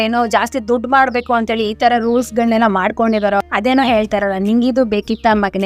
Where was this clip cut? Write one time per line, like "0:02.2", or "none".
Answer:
0:03.4